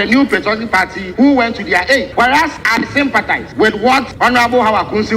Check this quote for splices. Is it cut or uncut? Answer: cut